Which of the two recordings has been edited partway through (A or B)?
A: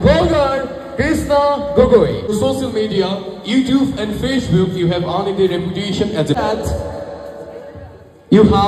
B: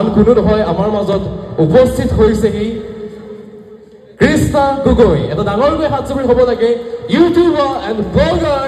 A